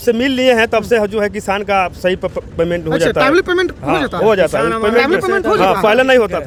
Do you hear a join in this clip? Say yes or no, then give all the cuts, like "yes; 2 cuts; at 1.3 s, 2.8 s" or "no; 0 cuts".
no; 0 cuts